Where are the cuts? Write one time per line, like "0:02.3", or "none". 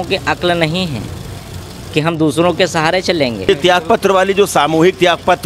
0:03.5